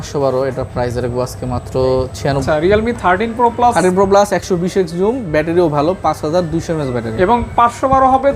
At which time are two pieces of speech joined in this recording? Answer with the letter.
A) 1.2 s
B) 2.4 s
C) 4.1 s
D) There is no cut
B